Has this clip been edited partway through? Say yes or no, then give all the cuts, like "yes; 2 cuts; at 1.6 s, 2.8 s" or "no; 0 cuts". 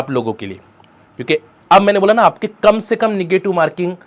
no; 0 cuts